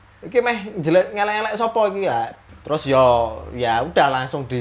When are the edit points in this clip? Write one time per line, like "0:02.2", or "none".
0:02.4